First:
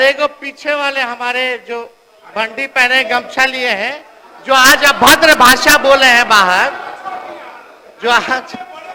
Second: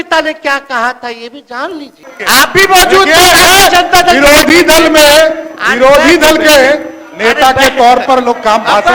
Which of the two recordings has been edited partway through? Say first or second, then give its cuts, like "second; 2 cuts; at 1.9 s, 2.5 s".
second; 1 cut; at 2.0 s